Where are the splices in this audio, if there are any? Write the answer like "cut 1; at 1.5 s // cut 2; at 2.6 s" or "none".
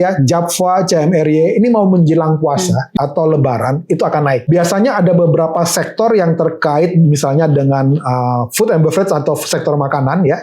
cut 1; at 2.9 s // cut 2; at 4.5 s

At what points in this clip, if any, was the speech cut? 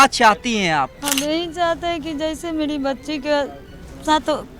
cut 1; at 1.0 s

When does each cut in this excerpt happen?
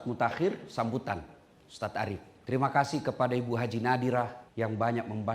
cut 1; at 2.3 s // cut 2; at 4.4 s

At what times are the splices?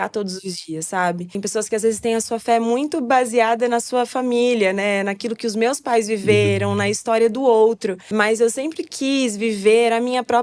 cut 1; at 1.3 s // cut 2; at 8.0 s

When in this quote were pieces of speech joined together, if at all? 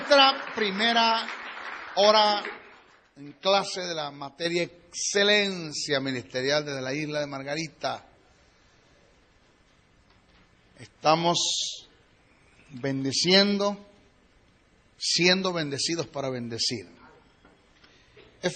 cut 1; at 10.2 s

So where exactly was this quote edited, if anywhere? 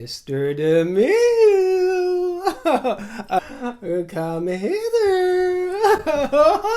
cut 1; at 3.4 s

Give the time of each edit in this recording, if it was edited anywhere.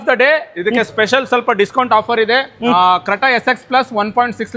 none

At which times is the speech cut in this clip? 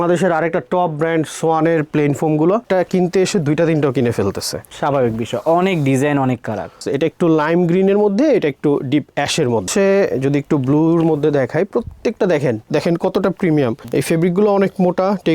cut 1; at 2.6 s // cut 2; at 6.8 s // cut 3; at 9.7 s // cut 4; at 12.6 s

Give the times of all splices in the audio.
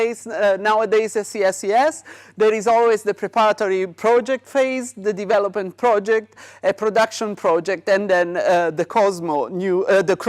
cut 1; at 2.3 s

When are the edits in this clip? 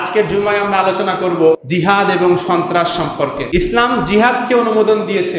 cut 1; at 1.6 s // cut 2; at 3.4 s

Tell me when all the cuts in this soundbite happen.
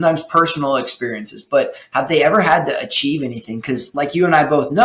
cut 1; at 3.9 s

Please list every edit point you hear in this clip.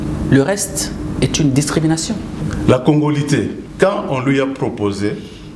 cut 1; at 2.4 s // cut 2; at 3.6 s

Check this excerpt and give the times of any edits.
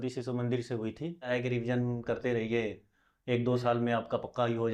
cut 1; at 1.3 s

